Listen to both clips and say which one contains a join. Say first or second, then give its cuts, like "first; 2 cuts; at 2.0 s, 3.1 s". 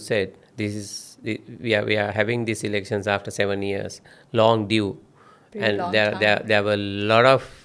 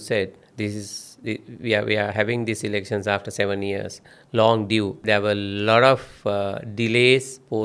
second; 1 cut; at 5.0 s